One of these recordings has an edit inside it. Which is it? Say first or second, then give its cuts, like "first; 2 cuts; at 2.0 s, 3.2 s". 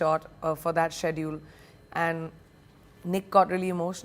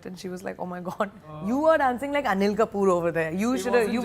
second; 1 cut; at 1.5 s